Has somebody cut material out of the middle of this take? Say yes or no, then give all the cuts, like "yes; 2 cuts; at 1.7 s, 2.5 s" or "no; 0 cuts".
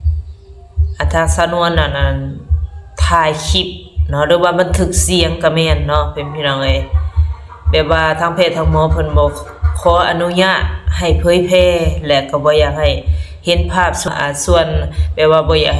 yes; 1 cut; at 14.1 s